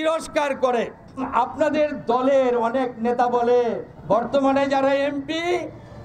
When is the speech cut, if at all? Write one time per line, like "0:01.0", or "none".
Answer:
0:01.2
0:03.9